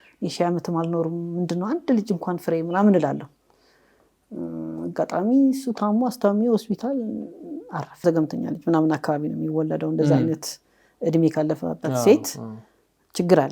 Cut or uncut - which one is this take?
cut